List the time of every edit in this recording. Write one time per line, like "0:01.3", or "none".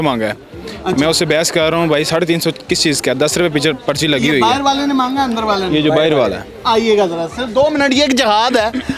none